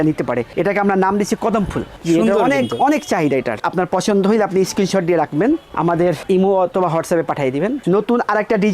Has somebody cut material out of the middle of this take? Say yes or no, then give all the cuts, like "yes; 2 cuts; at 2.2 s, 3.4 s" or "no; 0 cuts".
yes; 2 cuts; at 3.5 s, 7.8 s